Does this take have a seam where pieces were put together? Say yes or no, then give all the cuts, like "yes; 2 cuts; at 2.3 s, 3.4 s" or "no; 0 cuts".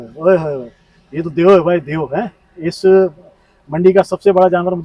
no; 0 cuts